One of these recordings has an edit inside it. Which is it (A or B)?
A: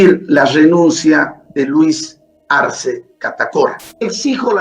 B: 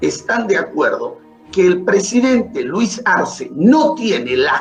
A